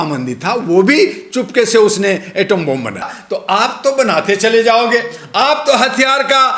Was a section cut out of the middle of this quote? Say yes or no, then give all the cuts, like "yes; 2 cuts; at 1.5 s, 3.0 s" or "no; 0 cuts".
yes; 1 cut; at 3.2 s